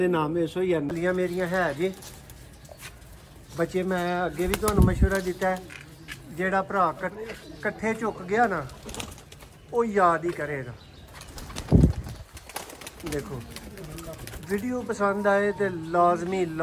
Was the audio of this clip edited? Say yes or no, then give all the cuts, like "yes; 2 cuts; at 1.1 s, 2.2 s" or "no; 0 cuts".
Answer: yes; 1 cut; at 0.9 s